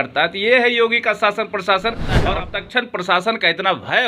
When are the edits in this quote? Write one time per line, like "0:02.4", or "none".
0:02.1